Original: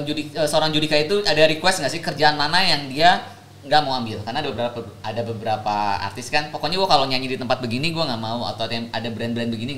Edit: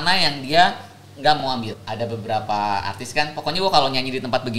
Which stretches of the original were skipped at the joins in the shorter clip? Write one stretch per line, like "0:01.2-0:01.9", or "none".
0:04.1-0:04.8

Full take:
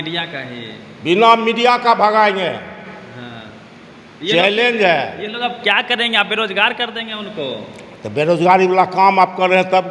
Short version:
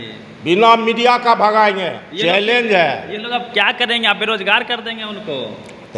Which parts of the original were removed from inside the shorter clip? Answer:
0:02.6-0:04.1

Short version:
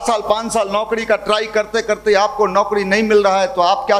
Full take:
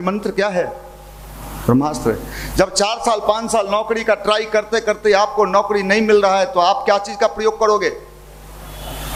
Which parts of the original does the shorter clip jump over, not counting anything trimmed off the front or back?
none

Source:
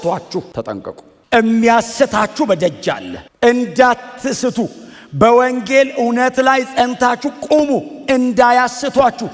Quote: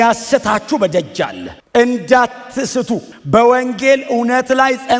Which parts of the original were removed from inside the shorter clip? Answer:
0:04.8-0:05.0

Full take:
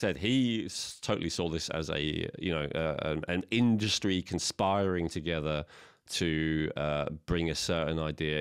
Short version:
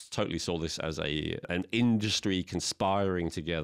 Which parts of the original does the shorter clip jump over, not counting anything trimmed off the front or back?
0:02.4-0:03.2

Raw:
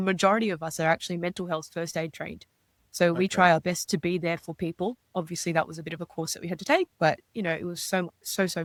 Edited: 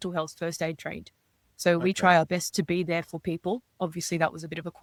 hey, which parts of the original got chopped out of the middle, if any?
none

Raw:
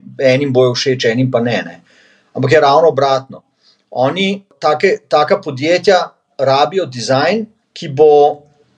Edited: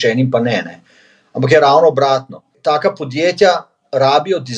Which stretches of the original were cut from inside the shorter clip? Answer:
0:03.6-0:05.0

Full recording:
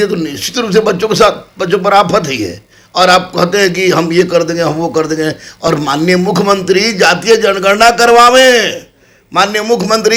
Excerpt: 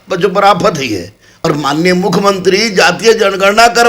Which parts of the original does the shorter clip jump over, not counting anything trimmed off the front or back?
0:02.8-0:05.5

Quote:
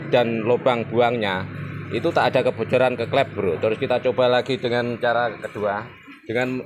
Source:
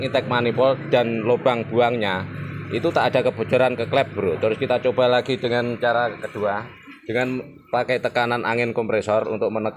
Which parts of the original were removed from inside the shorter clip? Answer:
none

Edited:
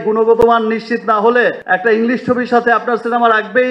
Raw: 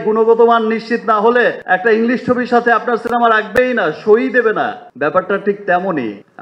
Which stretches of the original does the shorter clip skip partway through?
none

